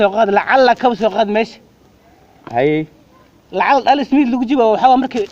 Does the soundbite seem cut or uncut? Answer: uncut